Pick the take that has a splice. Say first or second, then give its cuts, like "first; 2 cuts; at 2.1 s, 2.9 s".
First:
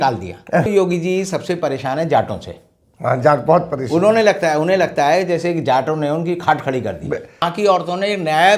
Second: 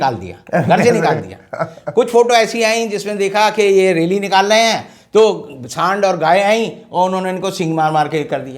first; 2 cuts; at 0.7 s, 7.5 s